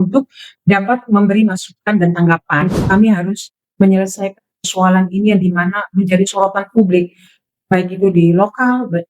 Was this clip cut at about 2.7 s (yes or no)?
yes